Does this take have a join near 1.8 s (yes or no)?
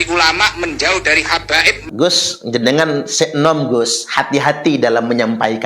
yes